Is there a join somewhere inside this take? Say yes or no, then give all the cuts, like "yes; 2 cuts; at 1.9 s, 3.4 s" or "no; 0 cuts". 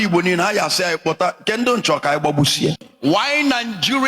yes; 1 cut; at 2.8 s